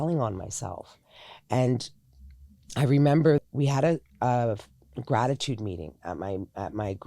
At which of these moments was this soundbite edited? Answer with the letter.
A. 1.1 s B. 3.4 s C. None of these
B